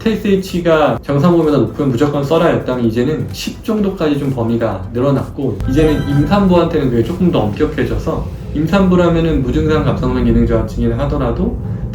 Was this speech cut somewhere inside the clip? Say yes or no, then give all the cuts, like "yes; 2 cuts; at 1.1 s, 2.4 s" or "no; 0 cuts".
yes; 1 cut; at 5.6 s